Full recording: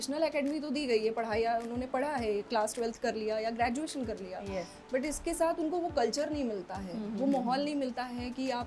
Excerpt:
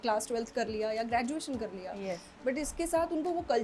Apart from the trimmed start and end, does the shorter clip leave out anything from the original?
no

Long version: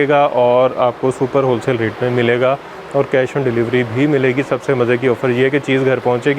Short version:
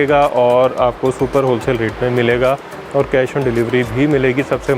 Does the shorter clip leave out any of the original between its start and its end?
no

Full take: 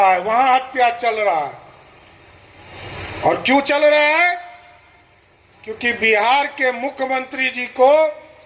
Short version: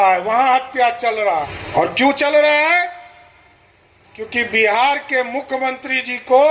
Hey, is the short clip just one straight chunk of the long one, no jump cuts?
no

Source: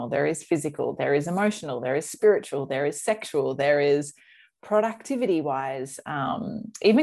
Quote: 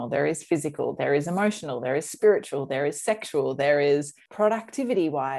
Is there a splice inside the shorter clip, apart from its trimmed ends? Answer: yes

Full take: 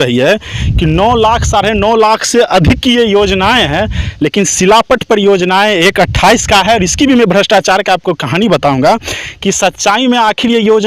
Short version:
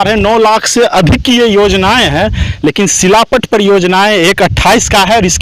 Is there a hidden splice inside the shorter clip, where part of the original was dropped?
no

